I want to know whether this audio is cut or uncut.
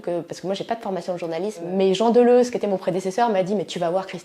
cut